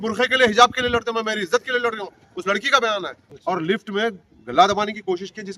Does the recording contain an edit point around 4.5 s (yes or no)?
no